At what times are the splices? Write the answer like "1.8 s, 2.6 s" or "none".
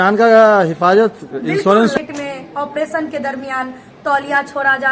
2.0 s